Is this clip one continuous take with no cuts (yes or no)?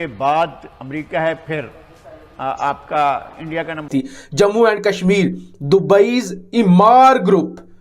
no